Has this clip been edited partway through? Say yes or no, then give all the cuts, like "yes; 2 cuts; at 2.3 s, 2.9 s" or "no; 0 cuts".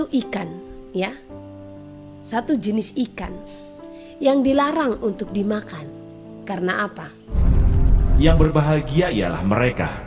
yes; 1 cut; at 7.3 s